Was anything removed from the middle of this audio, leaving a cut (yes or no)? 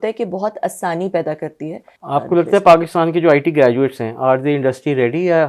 yes